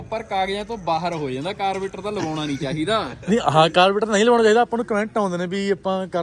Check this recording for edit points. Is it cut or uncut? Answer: uncut